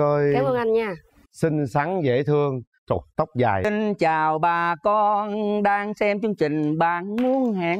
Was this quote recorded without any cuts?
no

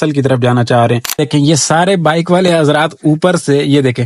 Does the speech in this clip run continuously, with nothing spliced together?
no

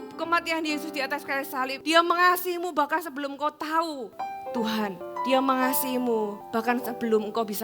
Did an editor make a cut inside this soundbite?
yes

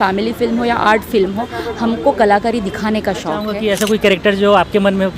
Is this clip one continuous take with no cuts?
no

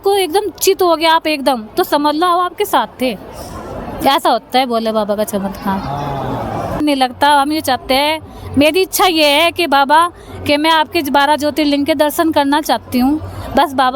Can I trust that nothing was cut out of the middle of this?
no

